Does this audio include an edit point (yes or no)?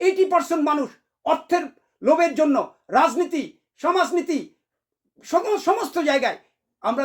no